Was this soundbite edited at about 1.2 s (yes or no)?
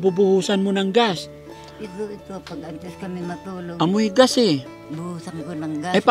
no